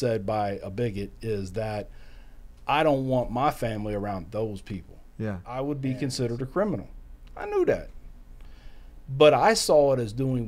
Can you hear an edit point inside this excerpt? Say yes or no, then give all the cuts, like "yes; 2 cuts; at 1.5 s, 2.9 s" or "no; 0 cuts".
yes; 1 cut; at 5.4 s